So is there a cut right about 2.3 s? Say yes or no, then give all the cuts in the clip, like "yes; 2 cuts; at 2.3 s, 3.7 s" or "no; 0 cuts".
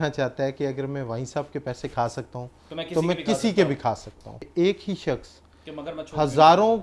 no; 1 cut; at 4.4 s